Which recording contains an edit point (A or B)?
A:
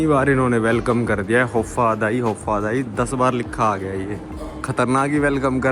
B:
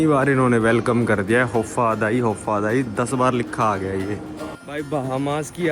B